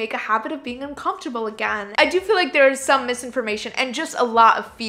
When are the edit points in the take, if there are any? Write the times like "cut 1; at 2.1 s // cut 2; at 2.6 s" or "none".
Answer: cut 1; at 1.8 s